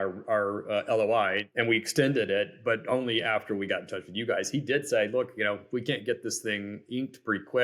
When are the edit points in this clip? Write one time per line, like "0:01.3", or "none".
0:01.4